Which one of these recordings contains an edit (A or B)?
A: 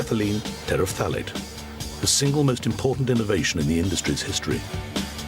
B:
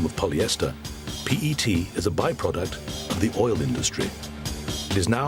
A